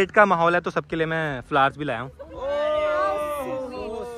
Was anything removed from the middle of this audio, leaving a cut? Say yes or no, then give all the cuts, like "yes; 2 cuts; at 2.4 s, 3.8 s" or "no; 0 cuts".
no; 0 cuts